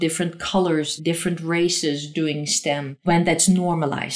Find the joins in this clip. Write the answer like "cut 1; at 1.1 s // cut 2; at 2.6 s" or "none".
cut 1; at 2.9 s